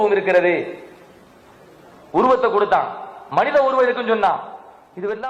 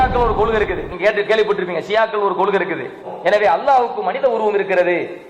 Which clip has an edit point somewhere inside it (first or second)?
second